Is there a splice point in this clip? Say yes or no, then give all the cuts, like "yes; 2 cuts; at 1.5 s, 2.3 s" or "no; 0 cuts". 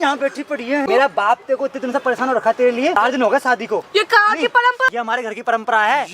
yes; 3 cuts; at 0.8 s, 3.0 s, 4.9 s